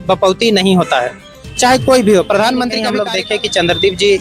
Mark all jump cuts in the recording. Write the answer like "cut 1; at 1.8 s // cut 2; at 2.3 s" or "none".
cut 1; at 2.9 s